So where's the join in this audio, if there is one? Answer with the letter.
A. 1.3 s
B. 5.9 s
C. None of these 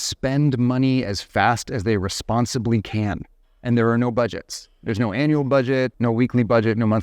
B